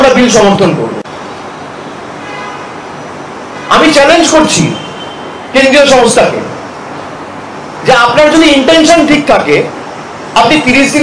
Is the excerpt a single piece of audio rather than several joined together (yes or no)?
no